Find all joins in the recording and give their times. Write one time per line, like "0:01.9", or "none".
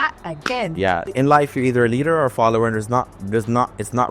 0:01.1

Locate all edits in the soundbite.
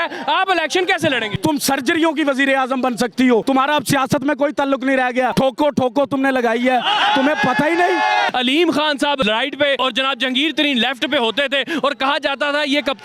0:01.3
0:03.4
0:05.3
0:08.3
0:09.7

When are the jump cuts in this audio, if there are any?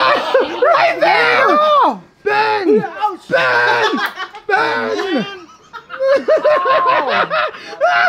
none

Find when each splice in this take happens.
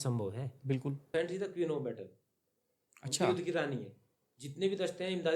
0:01.1

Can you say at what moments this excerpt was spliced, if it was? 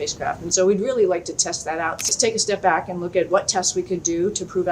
0:02.0

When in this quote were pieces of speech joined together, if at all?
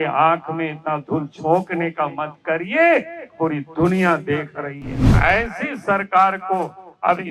0:05.2

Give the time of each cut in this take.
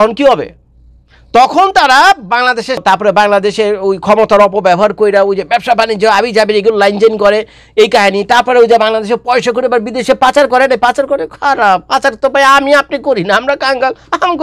0:02.8

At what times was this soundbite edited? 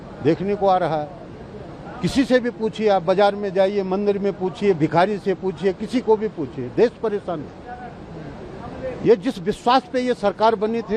none

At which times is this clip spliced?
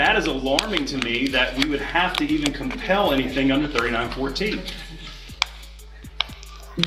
none

